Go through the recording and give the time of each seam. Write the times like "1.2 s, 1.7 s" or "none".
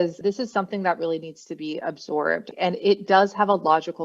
2.5 s